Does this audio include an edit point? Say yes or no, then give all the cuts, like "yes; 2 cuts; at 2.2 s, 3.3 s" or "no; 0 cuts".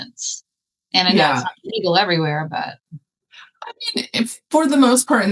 no; 0 cuts